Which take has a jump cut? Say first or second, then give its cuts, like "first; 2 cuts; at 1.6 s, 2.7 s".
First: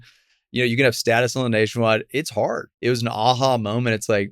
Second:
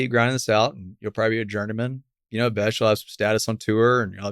first; 1 cut; at 2.7 s